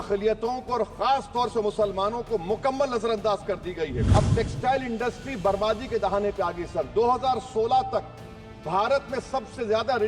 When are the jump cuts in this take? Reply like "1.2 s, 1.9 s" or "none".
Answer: 4.0 s